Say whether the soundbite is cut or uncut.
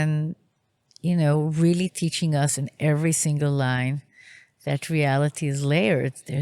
uncut